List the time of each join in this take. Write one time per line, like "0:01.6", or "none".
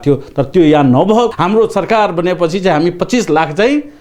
0:01.3